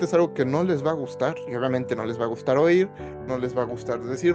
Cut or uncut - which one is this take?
uncut